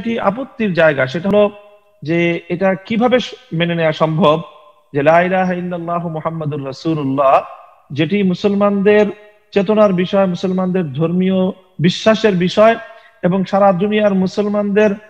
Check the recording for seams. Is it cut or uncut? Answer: cut